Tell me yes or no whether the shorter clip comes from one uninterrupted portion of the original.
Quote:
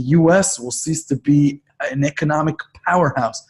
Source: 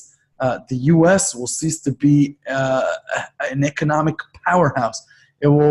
no